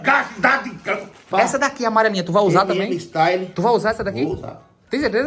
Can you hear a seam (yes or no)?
yes